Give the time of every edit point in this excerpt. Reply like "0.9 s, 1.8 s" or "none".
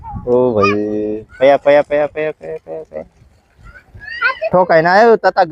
none